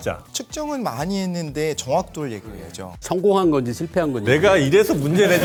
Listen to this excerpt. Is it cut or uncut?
uncut